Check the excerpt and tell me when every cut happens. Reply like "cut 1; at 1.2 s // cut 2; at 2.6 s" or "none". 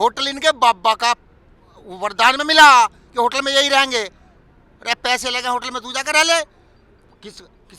none